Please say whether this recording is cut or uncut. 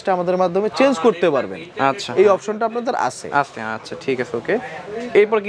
uncut